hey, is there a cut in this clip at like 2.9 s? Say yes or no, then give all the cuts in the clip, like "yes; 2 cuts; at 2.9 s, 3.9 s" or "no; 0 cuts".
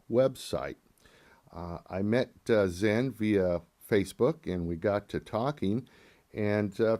yes; 1 cut; at 2.9 s